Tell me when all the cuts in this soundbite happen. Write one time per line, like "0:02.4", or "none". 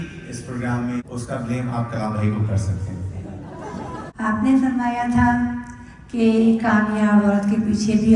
0:01.1
0:04.1